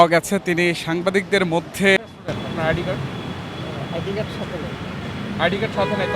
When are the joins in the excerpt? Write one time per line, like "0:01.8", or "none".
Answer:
0:02.0

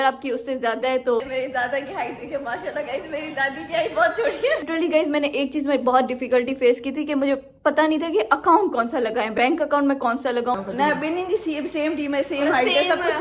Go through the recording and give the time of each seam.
0:01.2
0:04.6
0:10.6

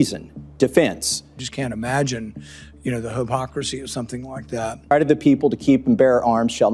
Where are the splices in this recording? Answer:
0:01.3
0:04.9

